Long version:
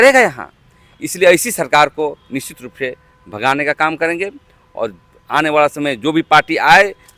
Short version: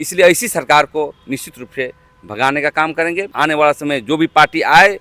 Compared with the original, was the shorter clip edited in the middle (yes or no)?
yes